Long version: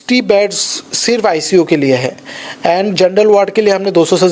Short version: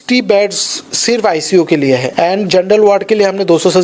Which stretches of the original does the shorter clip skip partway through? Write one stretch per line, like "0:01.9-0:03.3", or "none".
0:02.1-0:02.6